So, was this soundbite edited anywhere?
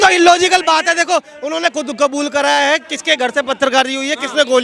no; 0 cuts

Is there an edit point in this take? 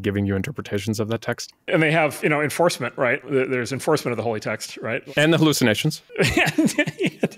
yes; 4 cuts; at 1.7 s, 3.2 s, 5.1 s, 6.0 s

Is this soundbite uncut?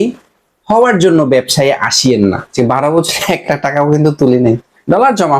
no; 1 cut; at 2.5 s

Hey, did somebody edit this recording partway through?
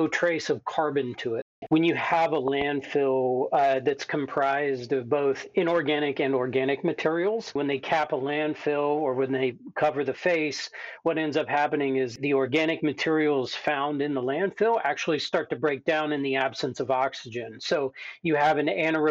yes; 2 cuts; at 1.6 s, 7.5 s

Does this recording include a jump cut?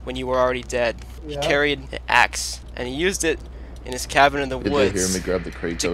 yes; 3 cuts; at 1.1 s, 1.9 s, 2.6 s

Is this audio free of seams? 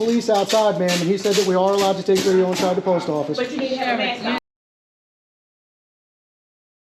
yes; 0 cuts

